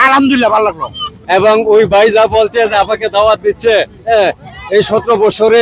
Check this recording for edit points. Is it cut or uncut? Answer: cut